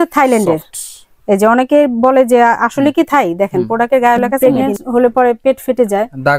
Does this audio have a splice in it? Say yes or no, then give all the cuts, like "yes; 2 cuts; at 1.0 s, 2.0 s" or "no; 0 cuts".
yes; 1 cut; at 4.3 s